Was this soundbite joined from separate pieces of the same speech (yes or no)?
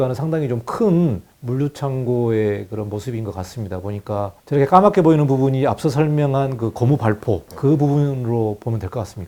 no